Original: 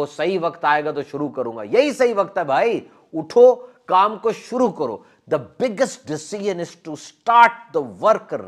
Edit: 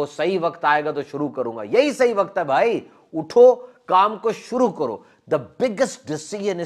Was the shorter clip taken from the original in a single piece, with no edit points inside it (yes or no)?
yes